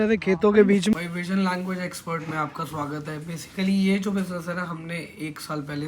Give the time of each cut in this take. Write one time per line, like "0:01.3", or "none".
0:00.9